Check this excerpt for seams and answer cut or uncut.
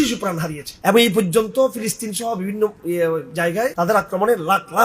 cut